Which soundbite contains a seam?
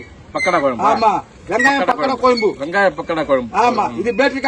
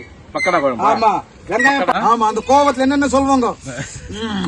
second; 1 cut; at 2.0 s

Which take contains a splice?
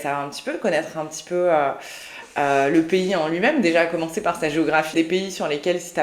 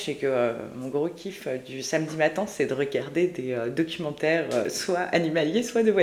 first; 1 cut; at 4.9 s

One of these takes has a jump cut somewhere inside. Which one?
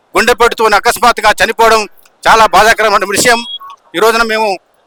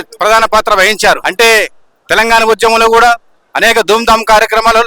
second; 1 cut; at 1.3 s

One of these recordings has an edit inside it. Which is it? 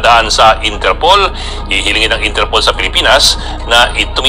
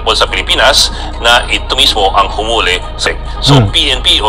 second; 1 cut; at 3.0 s

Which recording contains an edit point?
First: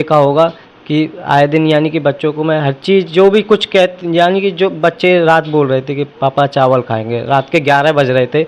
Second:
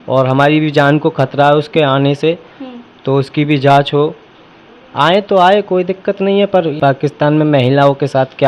second; 1 cut; at 6.7 s

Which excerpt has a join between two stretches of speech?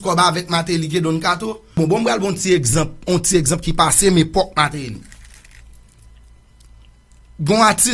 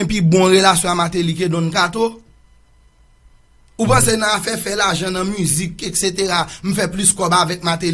first; 1 cut; at 1.8 s

